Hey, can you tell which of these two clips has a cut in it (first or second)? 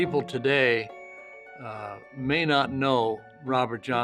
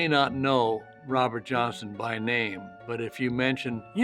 second